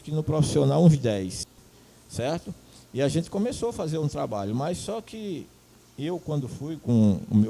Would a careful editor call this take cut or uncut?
uncut